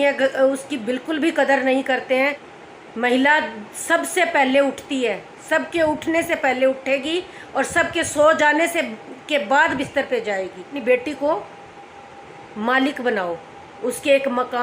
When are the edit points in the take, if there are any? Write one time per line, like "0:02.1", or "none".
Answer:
0:02.5
0:10.8